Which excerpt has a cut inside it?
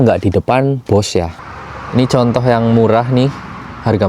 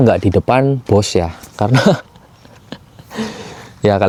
first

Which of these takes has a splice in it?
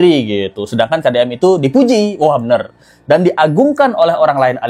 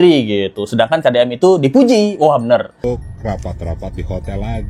second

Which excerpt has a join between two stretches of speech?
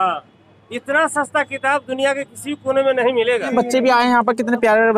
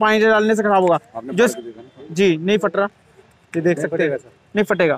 first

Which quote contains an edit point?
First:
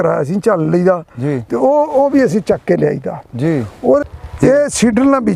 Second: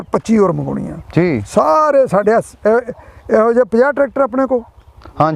first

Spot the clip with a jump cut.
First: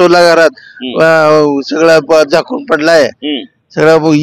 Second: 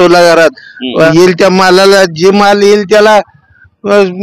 second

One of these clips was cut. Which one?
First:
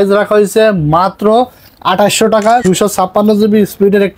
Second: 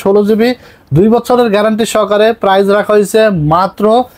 first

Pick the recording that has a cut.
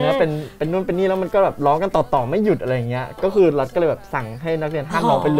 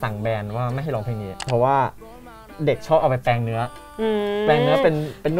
second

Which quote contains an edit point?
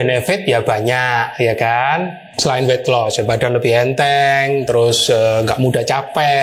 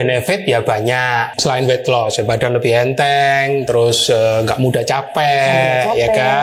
second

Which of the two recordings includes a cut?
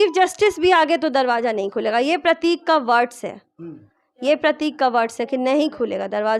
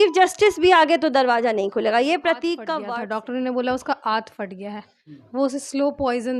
second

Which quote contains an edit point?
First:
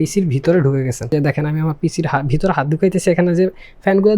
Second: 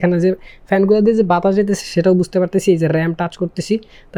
first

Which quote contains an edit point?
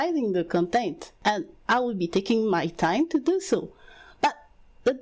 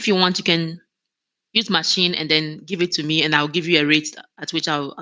first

